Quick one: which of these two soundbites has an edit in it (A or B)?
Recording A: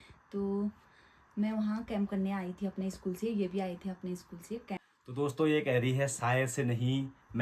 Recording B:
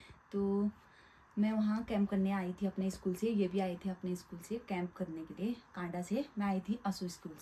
A